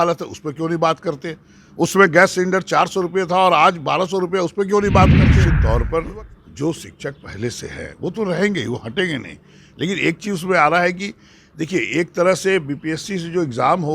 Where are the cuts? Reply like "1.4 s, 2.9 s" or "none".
5.5 s